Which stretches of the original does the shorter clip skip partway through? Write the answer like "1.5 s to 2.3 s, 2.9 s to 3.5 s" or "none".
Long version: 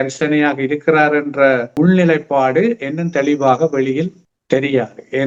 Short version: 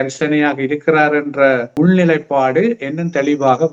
none